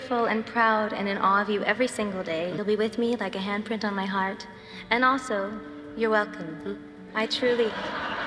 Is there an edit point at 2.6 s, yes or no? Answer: yes